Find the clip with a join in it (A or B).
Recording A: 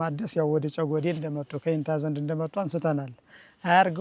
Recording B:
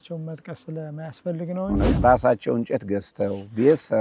B